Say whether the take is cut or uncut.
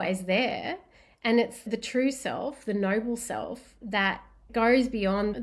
cut